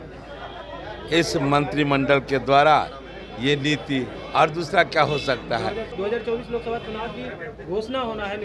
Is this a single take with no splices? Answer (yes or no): no